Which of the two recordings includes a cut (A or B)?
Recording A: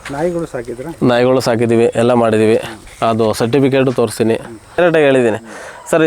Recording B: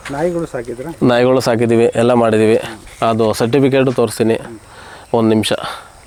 A